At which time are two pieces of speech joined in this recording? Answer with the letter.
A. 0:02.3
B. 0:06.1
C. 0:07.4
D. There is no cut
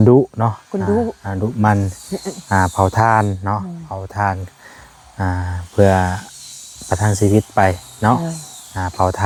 D